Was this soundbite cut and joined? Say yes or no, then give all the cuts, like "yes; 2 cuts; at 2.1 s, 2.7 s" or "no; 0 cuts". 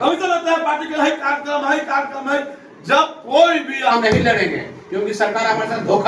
yes; 1 cut; at 3.9 s